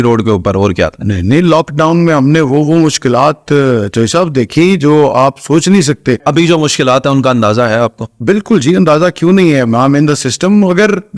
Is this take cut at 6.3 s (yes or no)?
yes